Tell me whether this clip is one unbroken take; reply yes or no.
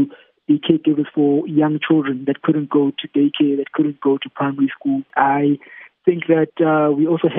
no